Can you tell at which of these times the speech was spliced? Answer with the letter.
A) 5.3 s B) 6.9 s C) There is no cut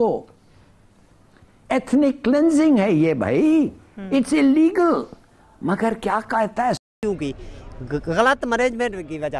B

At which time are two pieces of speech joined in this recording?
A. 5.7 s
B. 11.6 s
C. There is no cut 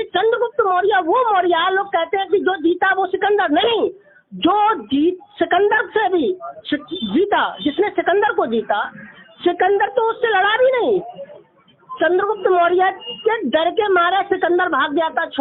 C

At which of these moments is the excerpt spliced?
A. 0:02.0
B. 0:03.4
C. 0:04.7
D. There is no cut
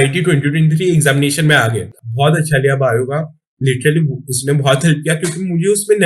A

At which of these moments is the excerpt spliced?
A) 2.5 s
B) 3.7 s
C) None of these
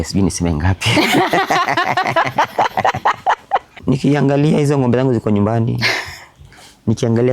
B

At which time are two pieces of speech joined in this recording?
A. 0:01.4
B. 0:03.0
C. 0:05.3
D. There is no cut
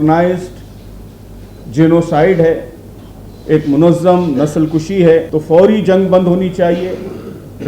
C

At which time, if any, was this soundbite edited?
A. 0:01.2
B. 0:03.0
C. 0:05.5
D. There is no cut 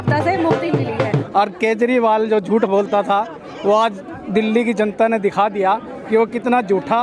A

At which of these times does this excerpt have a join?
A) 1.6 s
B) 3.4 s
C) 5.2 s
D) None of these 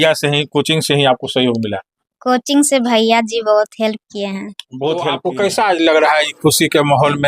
C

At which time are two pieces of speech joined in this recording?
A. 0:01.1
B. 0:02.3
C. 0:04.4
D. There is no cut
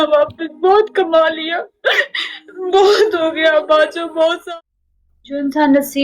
C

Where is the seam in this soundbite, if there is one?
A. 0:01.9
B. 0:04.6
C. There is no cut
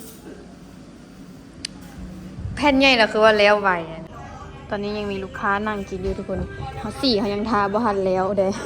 B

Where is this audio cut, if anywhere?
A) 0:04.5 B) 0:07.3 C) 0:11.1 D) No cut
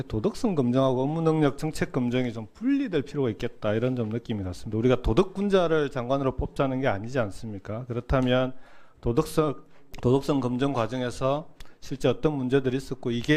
D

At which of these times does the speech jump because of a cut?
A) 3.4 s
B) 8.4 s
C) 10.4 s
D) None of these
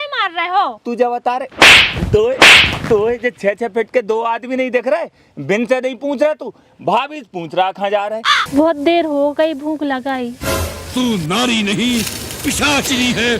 B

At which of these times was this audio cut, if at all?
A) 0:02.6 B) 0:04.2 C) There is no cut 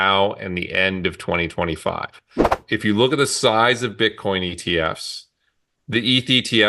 A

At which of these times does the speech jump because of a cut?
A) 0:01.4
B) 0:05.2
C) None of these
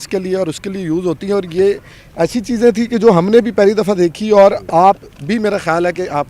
C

